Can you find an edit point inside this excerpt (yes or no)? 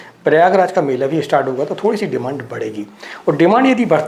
no